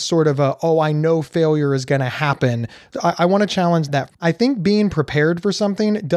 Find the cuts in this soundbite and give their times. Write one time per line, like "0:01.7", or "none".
0:02.9
0:04.2